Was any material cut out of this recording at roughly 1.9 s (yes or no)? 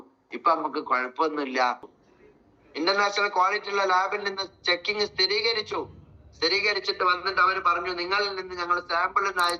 yes